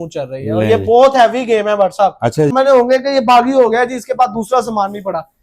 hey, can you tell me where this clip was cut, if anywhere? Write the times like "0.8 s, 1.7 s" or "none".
2.5 s